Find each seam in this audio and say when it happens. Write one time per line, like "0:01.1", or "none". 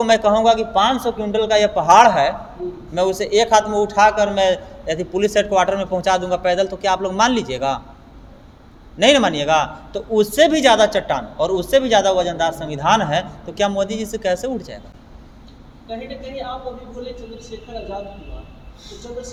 none

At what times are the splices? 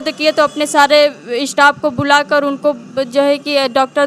none

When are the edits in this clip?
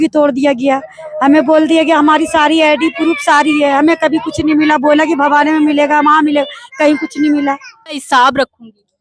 0:08.0

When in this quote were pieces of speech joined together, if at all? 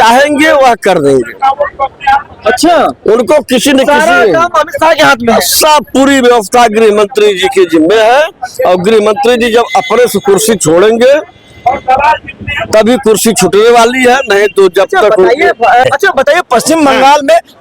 0:15.8

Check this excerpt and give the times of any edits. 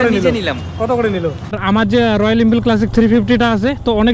0:01.6

